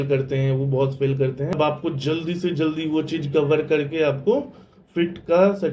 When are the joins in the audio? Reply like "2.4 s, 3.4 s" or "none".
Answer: 1.5 s